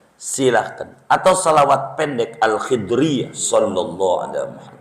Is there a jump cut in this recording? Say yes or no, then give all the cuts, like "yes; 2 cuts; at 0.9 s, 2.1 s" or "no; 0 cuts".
yes; 1 cut; at 3.4 s